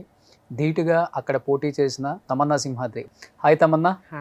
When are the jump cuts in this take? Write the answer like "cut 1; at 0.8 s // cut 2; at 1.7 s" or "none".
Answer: cut 1; at 2.2 s // cut 2; at 3.0 s